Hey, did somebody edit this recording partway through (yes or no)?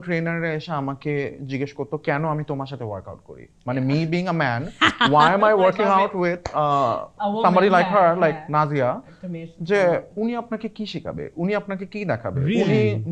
no